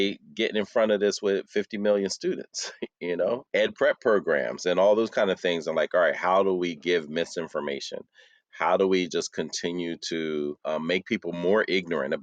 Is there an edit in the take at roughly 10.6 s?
yes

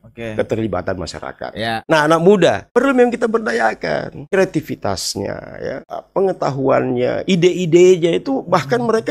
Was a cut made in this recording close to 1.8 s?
yes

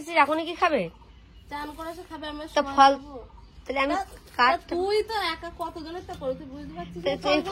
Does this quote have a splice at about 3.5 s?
no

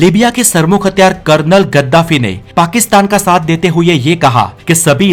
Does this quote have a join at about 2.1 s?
no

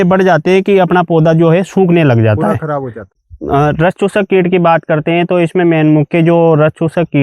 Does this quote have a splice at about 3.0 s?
yes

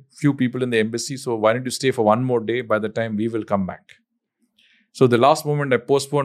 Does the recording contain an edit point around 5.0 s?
no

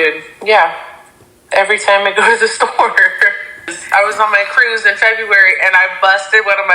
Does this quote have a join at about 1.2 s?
no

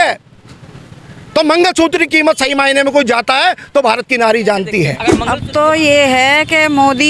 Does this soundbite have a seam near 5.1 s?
yes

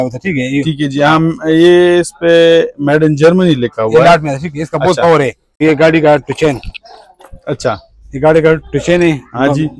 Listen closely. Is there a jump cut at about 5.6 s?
yes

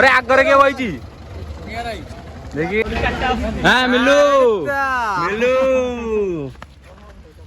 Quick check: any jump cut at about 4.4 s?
no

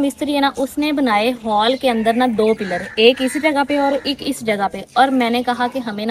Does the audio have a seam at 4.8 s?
no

